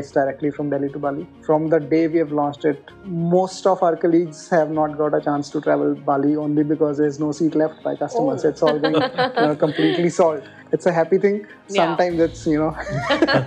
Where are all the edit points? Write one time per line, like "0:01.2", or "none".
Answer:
0:02.8
0:06.9